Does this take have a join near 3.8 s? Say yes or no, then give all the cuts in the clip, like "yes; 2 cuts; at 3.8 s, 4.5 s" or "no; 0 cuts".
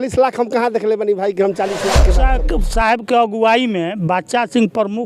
no; 1 cut; at 2.2 s